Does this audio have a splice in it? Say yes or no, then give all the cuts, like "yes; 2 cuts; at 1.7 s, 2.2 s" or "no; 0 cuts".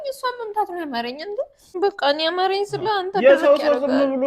yes; 1 cut; at 1.6 s